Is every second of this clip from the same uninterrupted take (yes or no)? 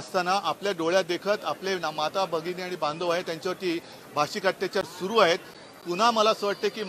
no